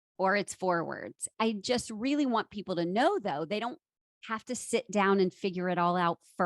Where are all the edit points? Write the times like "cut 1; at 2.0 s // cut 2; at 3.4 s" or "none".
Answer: cut 1; at 1.3 s